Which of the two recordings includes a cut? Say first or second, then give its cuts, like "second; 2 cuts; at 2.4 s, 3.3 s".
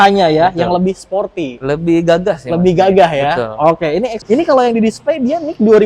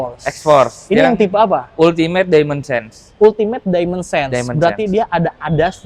first; 1 cut; at 4.2 s